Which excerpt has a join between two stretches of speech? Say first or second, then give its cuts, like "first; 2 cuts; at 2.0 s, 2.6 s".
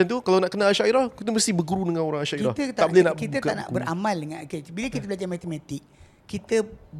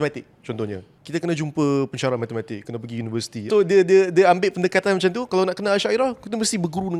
second; 2 cuts; at 0.9 s, 3.5 s